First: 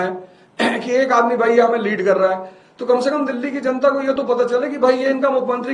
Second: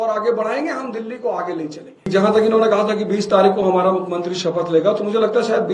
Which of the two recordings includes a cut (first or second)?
second